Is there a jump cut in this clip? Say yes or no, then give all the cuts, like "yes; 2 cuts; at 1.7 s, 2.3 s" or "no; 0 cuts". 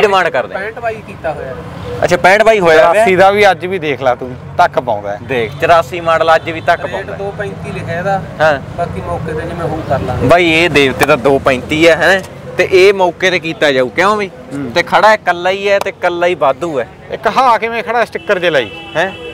no; 0 cuts